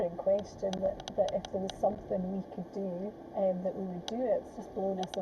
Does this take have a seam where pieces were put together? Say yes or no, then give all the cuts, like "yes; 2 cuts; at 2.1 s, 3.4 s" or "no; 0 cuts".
yes; 3 cuts; at 1.0 s, 3.2 s, 4.4 s